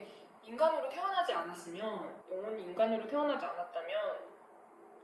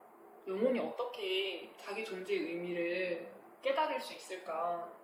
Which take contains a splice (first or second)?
first